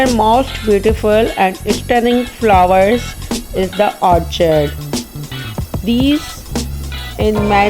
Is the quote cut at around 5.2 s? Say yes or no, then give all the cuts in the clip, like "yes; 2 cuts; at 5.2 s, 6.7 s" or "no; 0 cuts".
no; 0 cuts